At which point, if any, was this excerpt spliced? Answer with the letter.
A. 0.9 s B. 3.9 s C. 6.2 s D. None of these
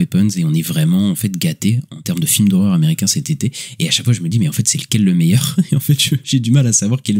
C